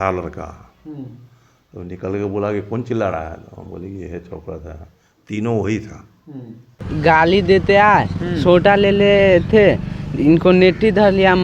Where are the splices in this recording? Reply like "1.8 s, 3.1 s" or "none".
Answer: 6.8 s